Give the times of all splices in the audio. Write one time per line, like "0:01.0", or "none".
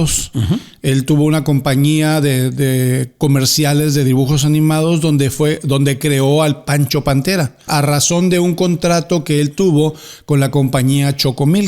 0:07.7